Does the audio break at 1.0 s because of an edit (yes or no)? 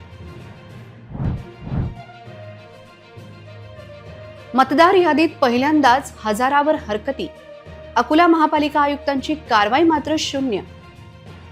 no